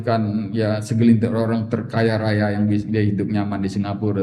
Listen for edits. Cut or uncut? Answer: uncut